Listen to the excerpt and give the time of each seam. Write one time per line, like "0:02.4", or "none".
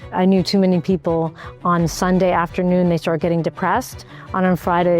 none